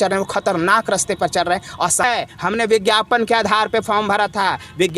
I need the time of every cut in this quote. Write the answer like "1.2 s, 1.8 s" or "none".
2.0 s